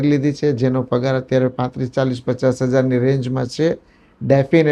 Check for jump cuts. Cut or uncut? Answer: uncut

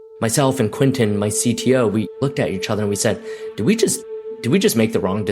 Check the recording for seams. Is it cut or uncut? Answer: cut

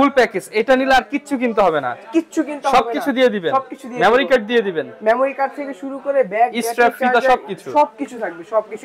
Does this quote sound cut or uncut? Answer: uncut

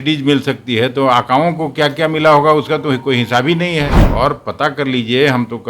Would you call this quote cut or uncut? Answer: cut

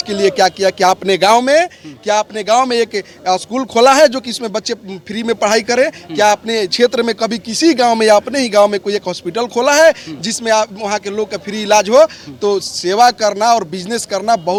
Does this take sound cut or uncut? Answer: uncut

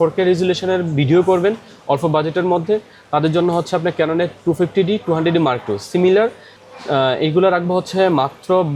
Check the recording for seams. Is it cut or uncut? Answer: uncut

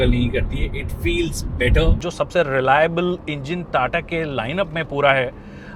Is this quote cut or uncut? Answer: cut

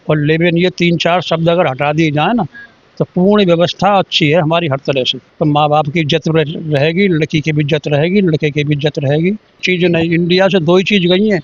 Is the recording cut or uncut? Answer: cut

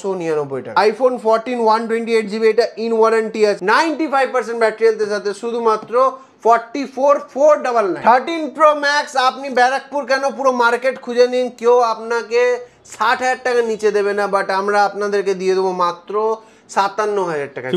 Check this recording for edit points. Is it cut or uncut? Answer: cut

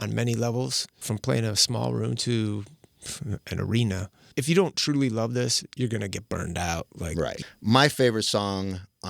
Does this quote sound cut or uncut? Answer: cut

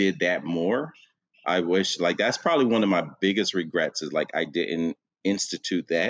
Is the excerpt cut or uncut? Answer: uncut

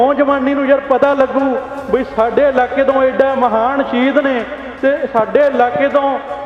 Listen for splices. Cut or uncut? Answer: uncut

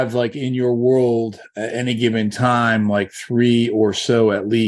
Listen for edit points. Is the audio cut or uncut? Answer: uncut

